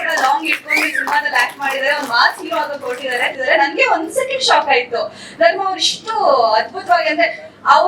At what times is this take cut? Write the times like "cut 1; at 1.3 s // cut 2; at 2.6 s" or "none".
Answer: cut 1; at 3.4 s